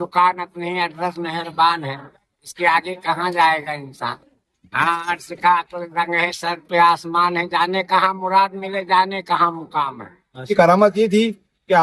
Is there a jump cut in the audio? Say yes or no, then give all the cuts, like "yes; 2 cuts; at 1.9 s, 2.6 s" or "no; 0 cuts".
yes; 1 cut; at 10.5 s